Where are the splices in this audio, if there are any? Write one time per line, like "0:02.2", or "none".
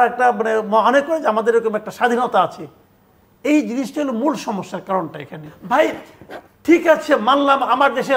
0:05.5

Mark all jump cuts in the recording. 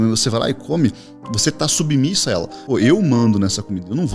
0:02.6

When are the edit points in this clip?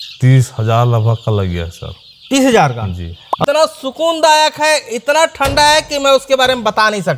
0:03.4

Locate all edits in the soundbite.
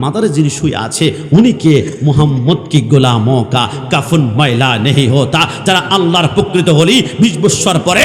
none

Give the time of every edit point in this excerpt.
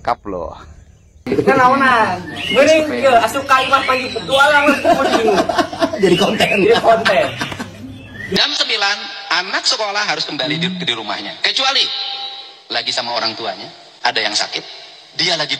0:01.3
0:08.4

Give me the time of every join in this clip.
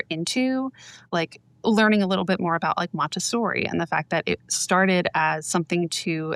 none

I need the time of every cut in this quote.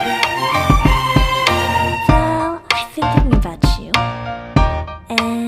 0:02.0

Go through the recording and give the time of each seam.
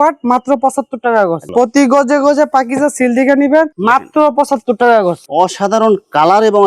0:01.4
0:05.2

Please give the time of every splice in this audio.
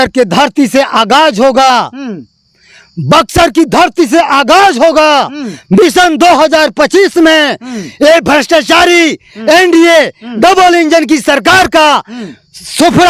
none

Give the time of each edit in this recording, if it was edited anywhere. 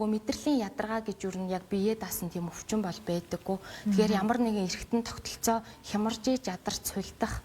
none

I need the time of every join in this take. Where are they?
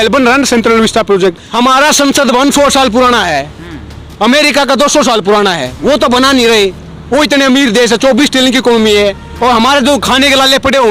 0:01.4

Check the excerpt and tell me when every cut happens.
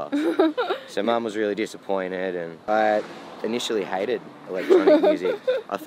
0:02.6

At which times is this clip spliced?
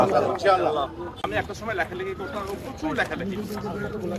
0:01.2

